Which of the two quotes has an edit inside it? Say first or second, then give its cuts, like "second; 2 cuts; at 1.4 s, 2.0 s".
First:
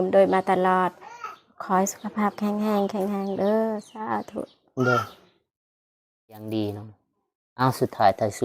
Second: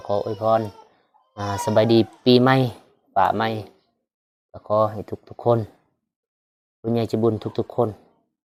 first; 1 cut; at 6.4 s